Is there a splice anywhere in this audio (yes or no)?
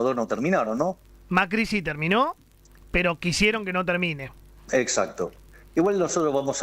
yes